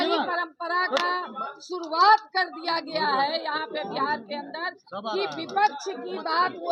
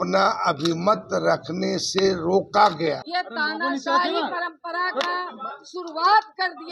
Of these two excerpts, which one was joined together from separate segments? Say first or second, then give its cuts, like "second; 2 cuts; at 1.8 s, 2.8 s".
second; 1 cut; at 3.0 s